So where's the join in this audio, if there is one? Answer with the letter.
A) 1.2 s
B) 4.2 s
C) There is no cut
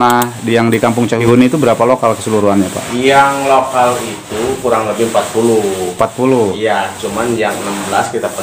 A